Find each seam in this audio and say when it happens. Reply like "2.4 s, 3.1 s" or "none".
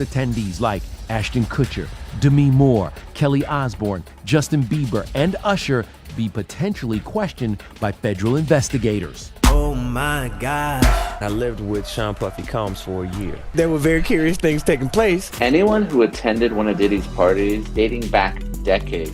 none